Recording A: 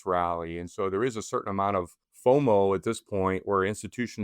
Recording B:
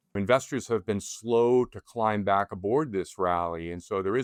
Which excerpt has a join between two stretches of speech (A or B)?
A